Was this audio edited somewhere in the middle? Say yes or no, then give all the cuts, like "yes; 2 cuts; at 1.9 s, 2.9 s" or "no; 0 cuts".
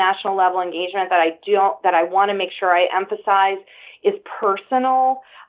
no; 0 cuts